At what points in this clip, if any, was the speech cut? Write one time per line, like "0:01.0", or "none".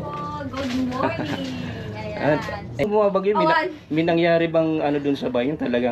0:02.9